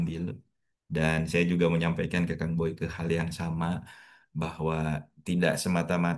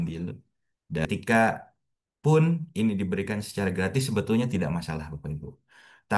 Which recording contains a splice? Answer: second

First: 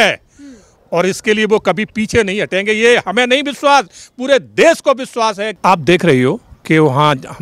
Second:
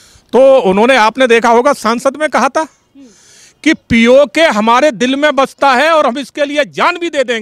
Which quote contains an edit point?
first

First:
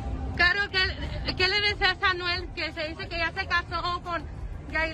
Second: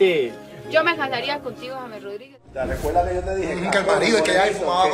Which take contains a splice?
second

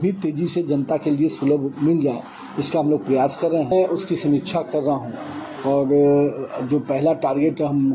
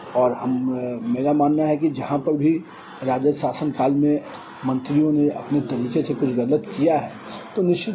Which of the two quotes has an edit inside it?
first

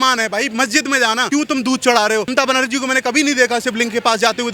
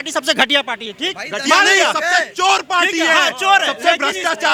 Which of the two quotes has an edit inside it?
first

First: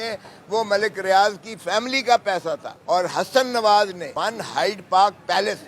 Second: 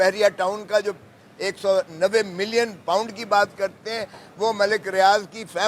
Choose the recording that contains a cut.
first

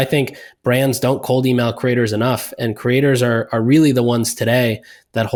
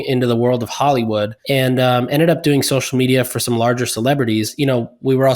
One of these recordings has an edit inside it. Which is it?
second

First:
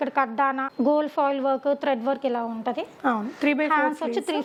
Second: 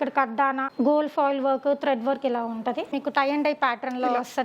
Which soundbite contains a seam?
second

